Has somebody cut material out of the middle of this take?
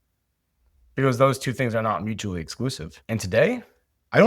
yes; 1 cut; at 2.9 s

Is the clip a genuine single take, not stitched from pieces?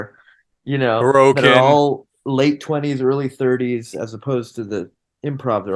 yes; 0 cuts

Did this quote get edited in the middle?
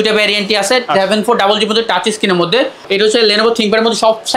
yes; 1 cut; at 2.8 s

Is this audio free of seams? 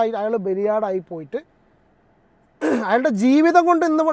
yes; 0 cuts

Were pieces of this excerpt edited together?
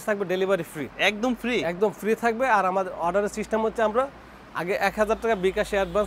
no; 0 cuts

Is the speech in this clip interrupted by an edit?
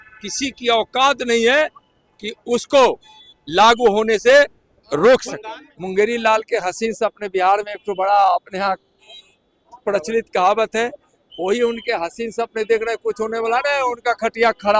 yes; 1 cut; at 5.4 s

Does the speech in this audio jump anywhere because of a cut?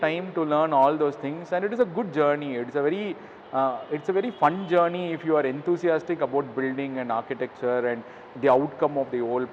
no; 0 cuts

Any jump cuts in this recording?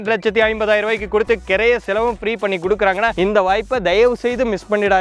no; 0 cuts

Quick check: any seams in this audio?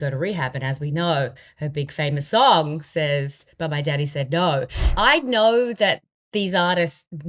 yes; 1 cut; at 4.8 s

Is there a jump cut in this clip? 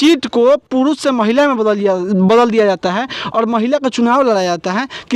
no; 0 cuts

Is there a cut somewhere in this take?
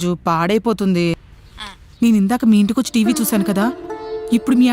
yes; 1 cut; at 1.3 s

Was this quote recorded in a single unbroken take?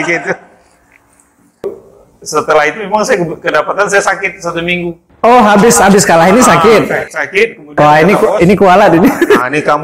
no; 1 cut; at 1.7 s

